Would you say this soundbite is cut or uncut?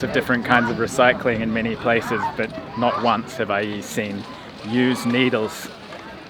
uncut